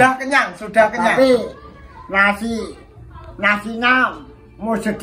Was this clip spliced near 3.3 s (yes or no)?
no